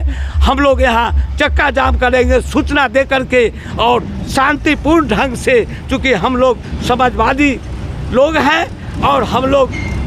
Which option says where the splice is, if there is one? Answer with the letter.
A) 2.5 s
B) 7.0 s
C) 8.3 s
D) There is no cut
D